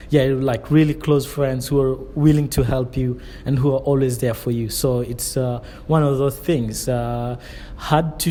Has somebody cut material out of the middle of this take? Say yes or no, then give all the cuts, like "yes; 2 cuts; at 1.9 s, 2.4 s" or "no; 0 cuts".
no; 0 cuts